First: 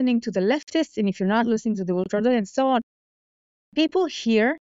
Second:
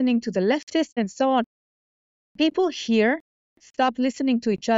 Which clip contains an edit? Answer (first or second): second